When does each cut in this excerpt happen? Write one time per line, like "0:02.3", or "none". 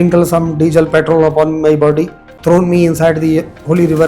0:02.3